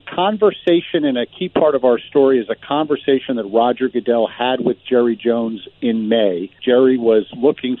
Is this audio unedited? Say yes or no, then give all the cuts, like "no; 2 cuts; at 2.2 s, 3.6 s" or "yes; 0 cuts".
no; 1 cut; at 6.6 s